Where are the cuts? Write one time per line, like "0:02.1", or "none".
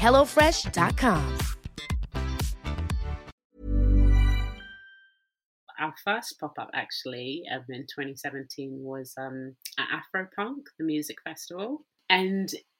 0:03.3
0:05.5
0:11.9